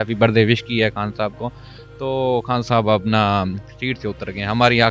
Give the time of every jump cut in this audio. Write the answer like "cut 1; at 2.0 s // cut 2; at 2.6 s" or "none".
none